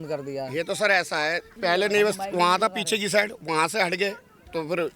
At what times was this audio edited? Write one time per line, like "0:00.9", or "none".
0:01.5